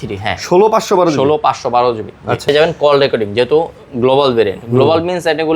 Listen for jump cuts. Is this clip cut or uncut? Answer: cut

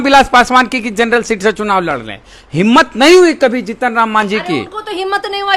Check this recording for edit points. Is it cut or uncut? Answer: uncut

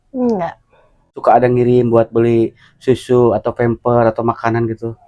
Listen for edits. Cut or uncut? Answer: cut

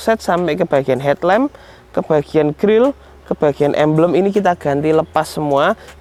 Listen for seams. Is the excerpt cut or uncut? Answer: uncut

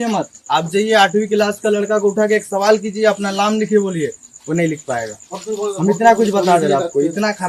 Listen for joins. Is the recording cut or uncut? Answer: uncut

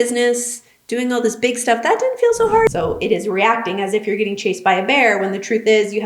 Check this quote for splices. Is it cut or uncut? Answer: cut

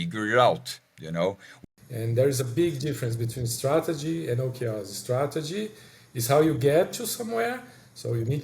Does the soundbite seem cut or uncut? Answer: cut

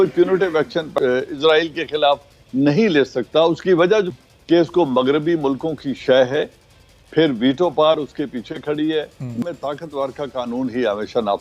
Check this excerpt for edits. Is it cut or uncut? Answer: cut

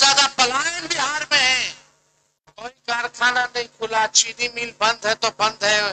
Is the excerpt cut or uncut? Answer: uncut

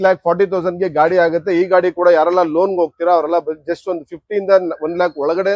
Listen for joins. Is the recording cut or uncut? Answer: uncut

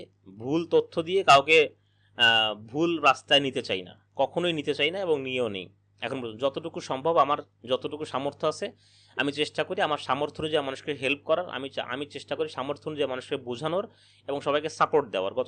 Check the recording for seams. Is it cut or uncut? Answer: uncut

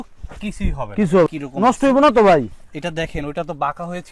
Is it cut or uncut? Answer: cut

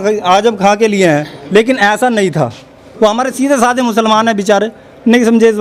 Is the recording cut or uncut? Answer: uncut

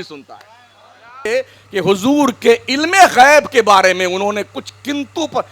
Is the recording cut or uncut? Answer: cut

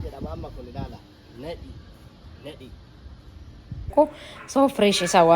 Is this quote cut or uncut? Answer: cut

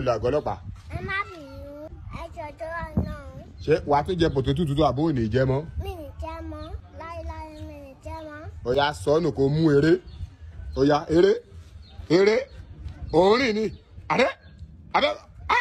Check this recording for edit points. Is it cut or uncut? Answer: uncut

